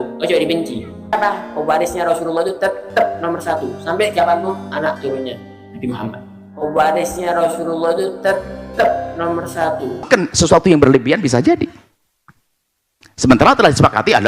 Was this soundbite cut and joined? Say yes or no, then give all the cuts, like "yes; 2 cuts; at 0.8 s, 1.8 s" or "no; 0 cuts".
yes; 2 cuts; at 1.1 s, 10.1 s